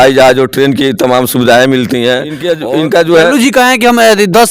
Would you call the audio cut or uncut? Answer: cut